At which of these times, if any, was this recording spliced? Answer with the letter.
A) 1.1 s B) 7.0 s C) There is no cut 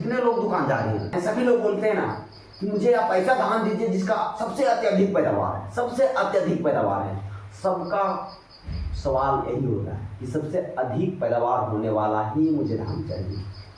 A